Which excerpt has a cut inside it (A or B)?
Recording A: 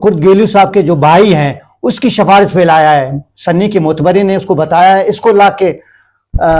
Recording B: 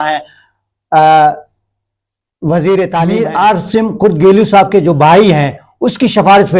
B